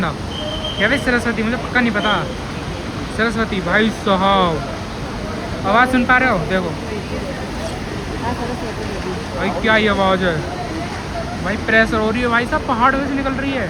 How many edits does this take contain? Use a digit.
0